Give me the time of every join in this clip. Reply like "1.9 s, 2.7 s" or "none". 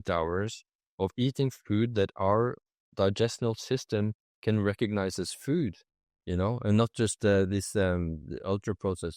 none